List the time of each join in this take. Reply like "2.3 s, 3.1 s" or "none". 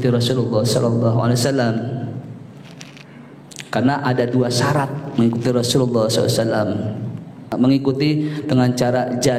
7.5 s